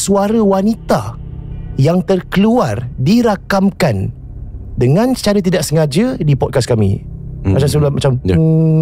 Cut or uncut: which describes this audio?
uncut